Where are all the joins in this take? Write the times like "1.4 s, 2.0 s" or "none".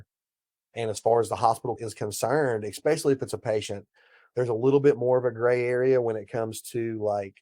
1.8 s